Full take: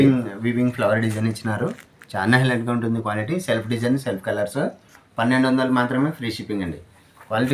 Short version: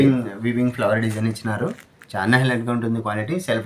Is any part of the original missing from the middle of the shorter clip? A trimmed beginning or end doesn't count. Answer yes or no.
no